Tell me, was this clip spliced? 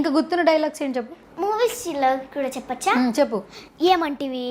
no; 0 cuts

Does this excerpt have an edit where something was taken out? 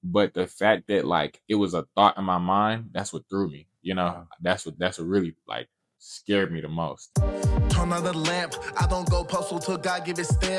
yes; 1 cut; at 7.0 s

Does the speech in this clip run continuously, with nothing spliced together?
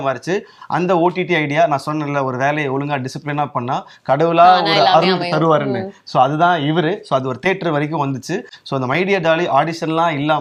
yes; 0 cuts

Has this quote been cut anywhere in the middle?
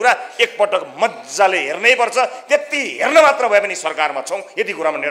no; 0 cuts

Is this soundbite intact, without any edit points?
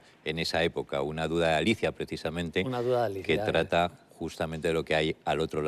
yes; 0 cuts

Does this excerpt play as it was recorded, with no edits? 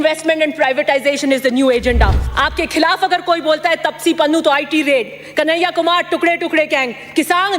no; 1 cut; at 2.2 s

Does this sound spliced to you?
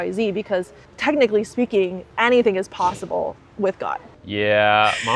yes; 2 cuts; at 2.0 s, 4.1 s

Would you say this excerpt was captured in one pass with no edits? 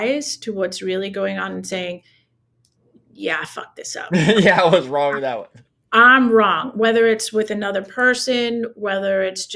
yes; 0 cuts

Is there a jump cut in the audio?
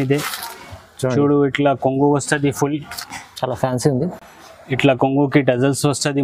no; 0 cuts

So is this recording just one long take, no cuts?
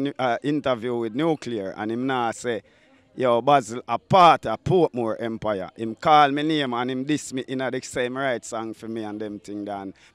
yes; 0 cuts

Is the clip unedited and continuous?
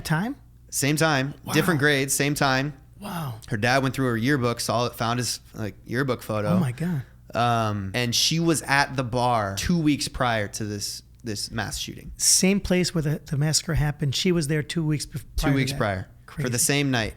no; 2 cuts; at 7.9 s, 9.6 s

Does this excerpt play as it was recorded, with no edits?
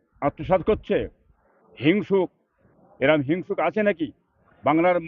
yes; 0 cuts

